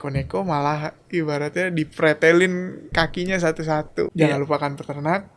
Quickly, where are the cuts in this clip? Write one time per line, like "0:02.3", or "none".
0:02.8
0:04.1